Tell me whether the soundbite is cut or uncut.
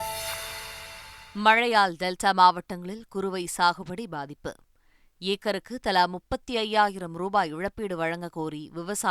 uncut